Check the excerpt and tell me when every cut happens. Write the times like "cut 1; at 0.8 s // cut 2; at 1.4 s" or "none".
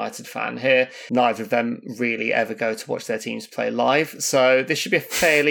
cut 1; at 1.0 s